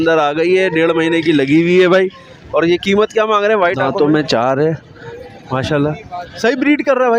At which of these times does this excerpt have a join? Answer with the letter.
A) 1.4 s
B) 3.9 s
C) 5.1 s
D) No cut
B